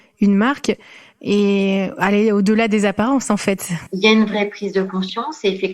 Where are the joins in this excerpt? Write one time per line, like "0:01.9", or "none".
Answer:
0:03.7